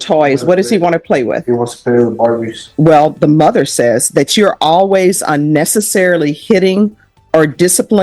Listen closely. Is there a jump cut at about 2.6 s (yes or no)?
yes